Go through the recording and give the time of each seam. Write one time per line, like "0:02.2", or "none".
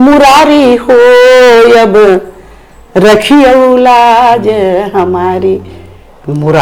none